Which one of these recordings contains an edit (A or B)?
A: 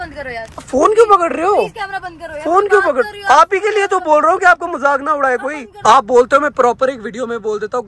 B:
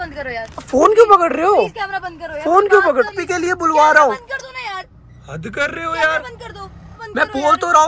B